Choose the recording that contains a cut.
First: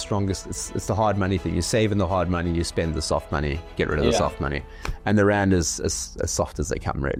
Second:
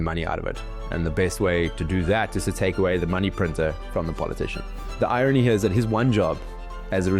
second; 1 cut; at 4.9 s

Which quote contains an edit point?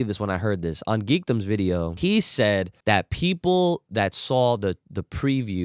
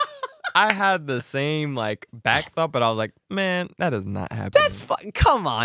first; 2 cuts; at 1.9 s, 2.7 s

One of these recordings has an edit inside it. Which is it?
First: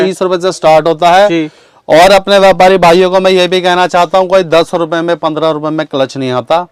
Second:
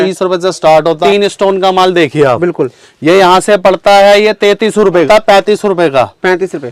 second; 2 cuts; at 1.0 s, 5.1 s

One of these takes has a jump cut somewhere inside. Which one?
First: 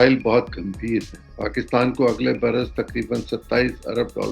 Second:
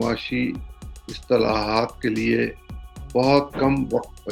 first; 1 cut; at 1.2 s

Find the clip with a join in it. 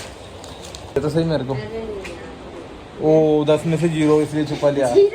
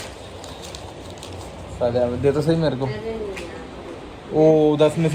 first; 1 cut; at 1.0 s

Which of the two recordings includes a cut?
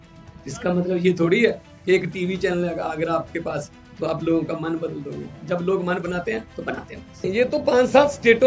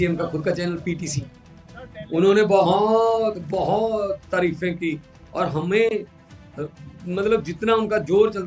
first; 1 cut; at 7.3 s

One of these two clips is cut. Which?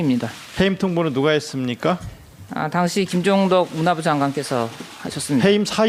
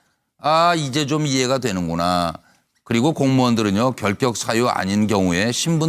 second; 1 cut; at 3.8 s

